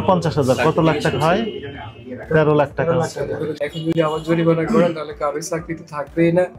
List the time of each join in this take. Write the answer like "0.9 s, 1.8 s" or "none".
3.6 s

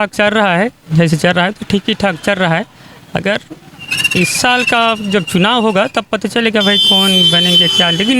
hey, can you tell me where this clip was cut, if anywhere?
none

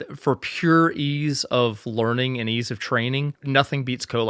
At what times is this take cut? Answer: 3.4 s

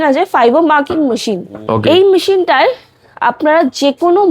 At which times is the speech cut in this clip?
1.5 s

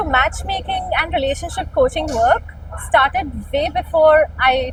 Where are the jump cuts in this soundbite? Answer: none

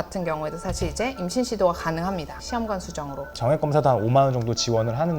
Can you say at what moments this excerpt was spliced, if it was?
3.3 s

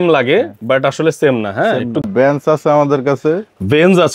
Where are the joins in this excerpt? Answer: 2.0 s

